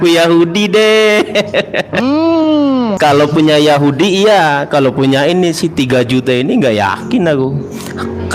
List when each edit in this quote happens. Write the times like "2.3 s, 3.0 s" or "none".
2.9 s